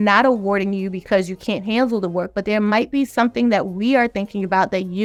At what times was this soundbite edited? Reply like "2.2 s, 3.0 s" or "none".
none

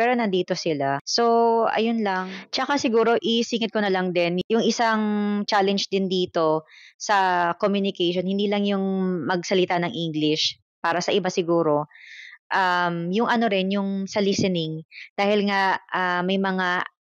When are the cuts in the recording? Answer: none

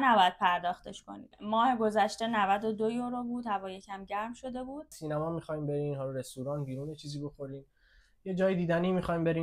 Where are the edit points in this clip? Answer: 5.0 s

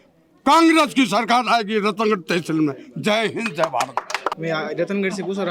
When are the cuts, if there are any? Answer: 4.3 s

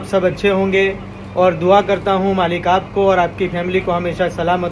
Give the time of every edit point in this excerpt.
none

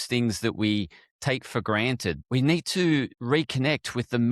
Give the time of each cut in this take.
2.2 s, 3.2 s

